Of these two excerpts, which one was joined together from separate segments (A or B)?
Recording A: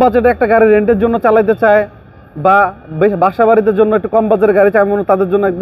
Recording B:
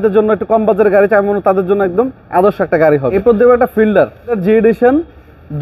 B